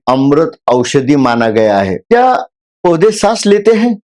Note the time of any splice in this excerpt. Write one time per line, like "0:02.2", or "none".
0:02.0